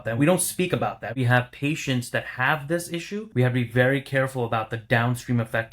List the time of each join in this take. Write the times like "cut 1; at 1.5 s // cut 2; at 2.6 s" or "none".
cut 1; at 1.2 s // cut 2; at 3.3 s